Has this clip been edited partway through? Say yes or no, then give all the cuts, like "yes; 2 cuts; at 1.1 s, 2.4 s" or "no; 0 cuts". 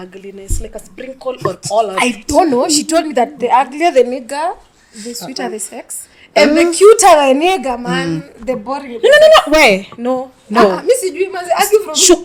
no; 0 cuts